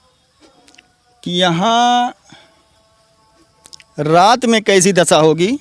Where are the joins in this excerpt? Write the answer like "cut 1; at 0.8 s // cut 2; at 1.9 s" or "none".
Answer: none